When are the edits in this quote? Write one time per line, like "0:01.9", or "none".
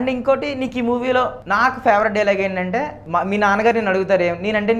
0:01.4
0:03.0